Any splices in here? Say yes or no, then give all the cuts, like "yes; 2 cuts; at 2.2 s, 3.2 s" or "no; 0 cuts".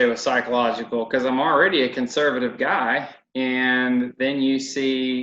no; 0 cuts